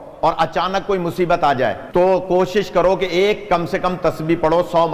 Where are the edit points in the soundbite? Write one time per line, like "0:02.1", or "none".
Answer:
0:01.8